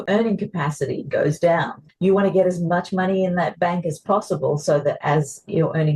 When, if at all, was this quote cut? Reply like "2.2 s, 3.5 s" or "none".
none